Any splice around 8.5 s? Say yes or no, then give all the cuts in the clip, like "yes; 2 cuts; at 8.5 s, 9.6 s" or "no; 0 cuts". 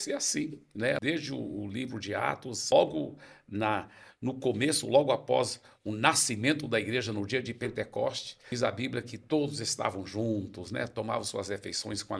yes; 3 cuts; at 1.0 s, 2.7 s, 8.5 s